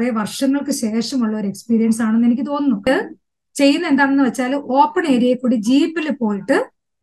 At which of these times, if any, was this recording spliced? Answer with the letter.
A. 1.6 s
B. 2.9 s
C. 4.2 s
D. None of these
B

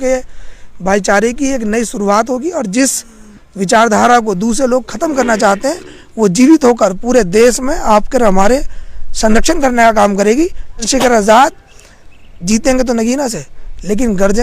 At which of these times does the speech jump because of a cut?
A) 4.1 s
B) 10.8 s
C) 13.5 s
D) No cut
B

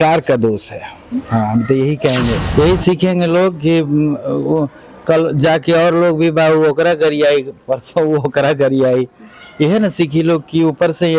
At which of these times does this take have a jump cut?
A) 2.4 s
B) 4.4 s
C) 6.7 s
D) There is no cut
A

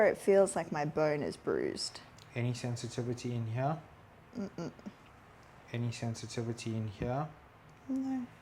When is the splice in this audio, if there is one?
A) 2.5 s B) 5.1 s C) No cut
C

